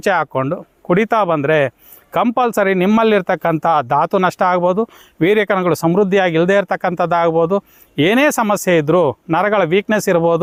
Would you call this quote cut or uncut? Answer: uncut